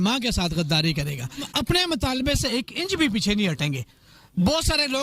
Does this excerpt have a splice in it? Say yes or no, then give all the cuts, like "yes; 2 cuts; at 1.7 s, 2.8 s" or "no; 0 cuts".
yes; 1 cut; at 1.5 s